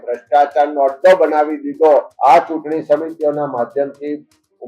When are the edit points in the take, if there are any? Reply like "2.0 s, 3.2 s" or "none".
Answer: 2.1 s